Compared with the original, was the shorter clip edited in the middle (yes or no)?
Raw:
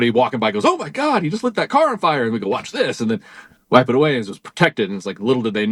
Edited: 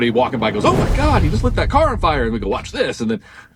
no